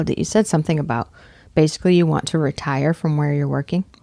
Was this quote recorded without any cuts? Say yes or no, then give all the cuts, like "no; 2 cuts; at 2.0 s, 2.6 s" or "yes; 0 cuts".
yes; 0 cuts